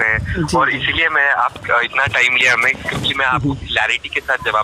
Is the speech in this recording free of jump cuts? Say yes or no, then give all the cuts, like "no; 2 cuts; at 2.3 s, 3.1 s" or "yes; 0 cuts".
yes; 0 cuts